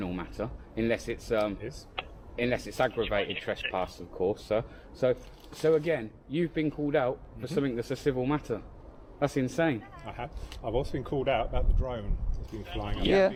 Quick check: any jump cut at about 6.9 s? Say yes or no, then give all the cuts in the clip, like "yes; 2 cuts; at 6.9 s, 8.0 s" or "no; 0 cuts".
no; 0 cuts